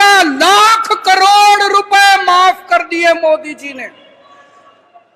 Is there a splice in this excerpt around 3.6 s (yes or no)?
no